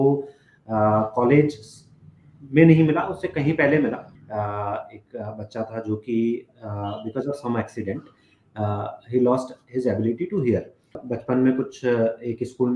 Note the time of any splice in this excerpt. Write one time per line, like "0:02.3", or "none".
0:04.1
0:11.0